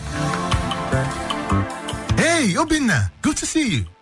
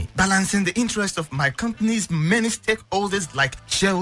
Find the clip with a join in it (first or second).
second